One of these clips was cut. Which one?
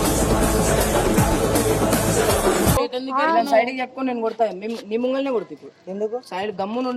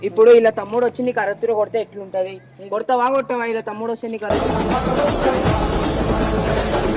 first; 1 cut; at 2.8 s

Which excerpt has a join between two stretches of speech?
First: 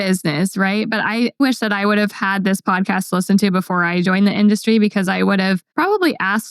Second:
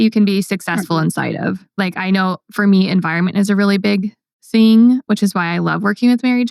first; 2 cuts; at 2.2 s, 5.7 s

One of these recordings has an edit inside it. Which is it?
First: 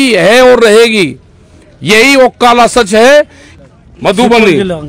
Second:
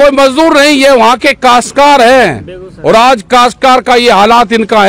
first; 1 cut; at 3.4 s

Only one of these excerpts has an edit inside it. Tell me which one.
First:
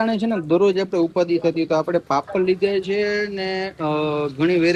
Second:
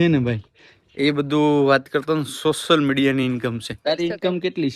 second; 1 cut; at 3.7 s

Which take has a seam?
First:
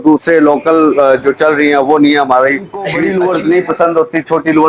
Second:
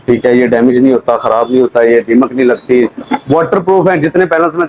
first; 1 cut; at 2.9 s

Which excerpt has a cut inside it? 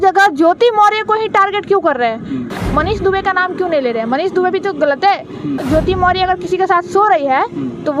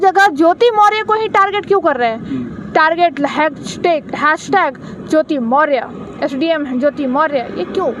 first; 2 cuts; at 2.5 s, 5.6 s

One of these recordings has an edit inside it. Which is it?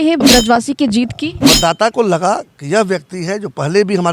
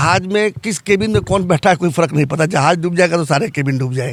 first; 1 cut; at 1.3 s

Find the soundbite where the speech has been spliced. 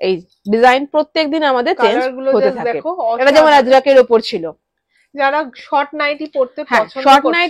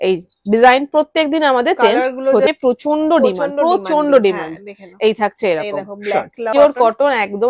second; 2 cuts; at 2.6 s, 6.5 s

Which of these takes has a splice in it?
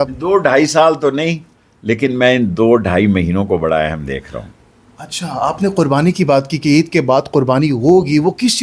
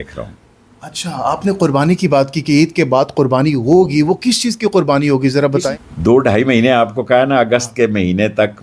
second; 1 cut; at 5.7 s

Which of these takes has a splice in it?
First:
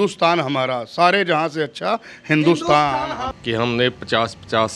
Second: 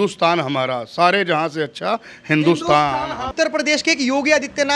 first; 1 cut; at 3.2 s

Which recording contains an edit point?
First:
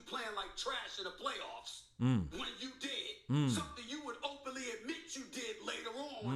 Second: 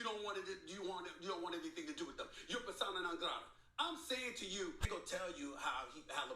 second; 1 cut; at 4.8 s

